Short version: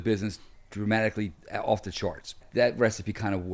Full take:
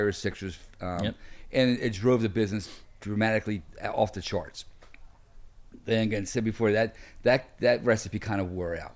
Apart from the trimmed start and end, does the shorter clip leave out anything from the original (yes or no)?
yes